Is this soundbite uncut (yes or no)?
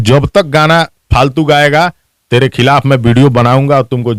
yes